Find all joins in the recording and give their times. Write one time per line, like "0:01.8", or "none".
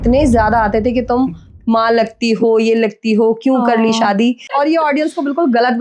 0:04.5